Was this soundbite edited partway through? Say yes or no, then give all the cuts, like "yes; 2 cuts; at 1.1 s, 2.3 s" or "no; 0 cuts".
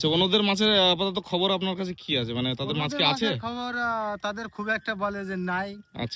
no; 0 cuts